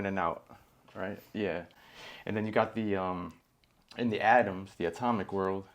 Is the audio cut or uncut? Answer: uncut